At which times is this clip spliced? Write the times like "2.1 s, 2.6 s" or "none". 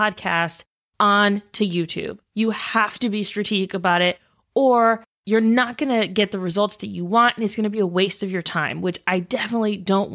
5.1 s